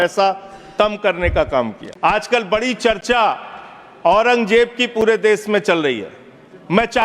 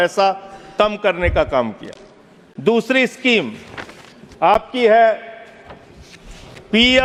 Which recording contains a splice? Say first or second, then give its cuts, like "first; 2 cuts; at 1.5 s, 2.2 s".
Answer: first; 1 cut; at 1.8 s